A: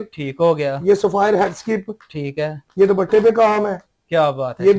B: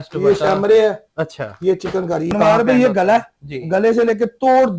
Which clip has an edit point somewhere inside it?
B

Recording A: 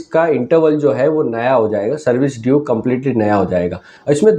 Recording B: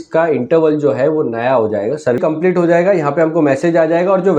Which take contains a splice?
B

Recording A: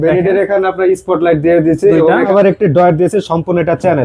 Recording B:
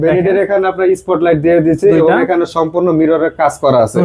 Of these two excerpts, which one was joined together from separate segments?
A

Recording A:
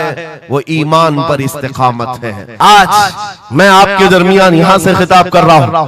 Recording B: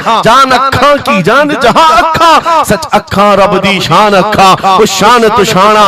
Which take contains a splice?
A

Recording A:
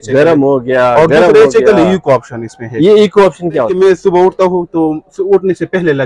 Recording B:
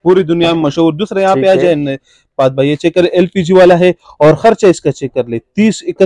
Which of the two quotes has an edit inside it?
A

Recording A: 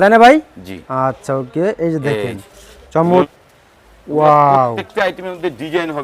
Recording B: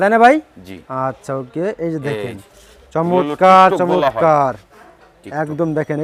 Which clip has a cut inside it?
A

